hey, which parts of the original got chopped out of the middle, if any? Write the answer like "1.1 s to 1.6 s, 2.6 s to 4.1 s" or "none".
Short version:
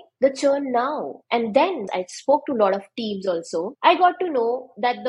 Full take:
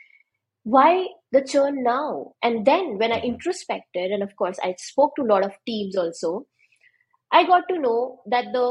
2.9 s to 4.5 s, 6.4 s to 7.2 s